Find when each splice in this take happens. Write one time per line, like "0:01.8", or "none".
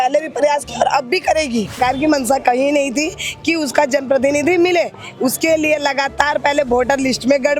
0:01.8